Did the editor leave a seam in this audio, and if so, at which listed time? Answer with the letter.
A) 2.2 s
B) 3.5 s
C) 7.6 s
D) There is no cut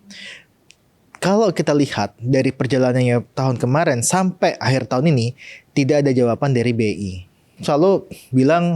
C